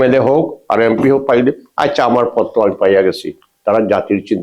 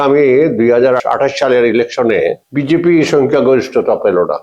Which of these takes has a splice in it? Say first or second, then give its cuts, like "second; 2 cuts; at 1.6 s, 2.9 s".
second; 2 cuts; at 1.0 s, 2.4 s